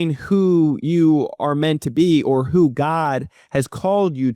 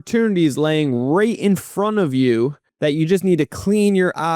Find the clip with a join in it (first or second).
second